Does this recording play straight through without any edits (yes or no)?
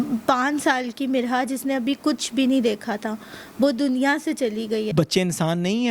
no